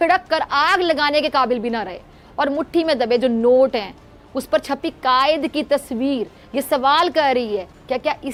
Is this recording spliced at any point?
no; 0 cuts

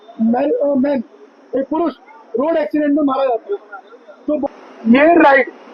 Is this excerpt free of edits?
no; 1 cut; at 4.4 s

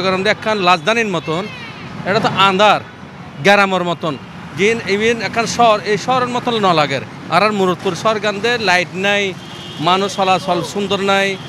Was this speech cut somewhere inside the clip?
no; 0 cuts

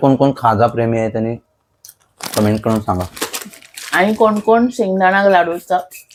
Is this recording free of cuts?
yes; 0 cuts

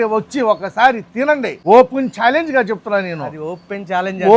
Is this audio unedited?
no; 1 cut; at 1.5 s

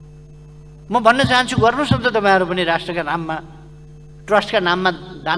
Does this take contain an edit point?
no; 0 cuts

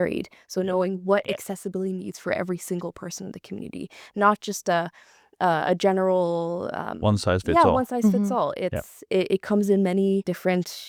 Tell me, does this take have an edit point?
no; 0 cuts

